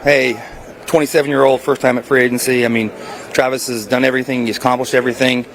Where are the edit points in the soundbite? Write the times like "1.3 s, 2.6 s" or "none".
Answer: none